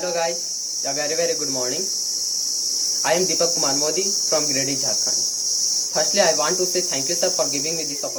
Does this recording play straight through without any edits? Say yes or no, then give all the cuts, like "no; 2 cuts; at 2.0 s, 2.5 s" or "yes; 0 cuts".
yes; 0 cuts